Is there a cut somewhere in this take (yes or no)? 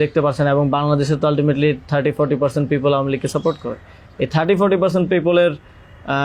no